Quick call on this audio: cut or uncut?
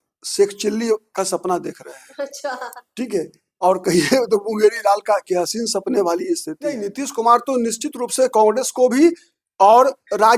cut